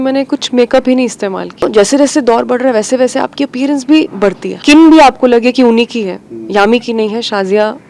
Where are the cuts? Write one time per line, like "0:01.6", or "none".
0:01.6
0:04.6